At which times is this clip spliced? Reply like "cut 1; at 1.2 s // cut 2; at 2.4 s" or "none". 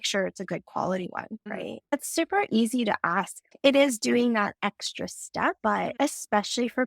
cut 1; at 1.9 s